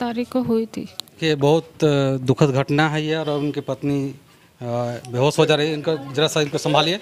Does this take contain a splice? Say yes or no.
yes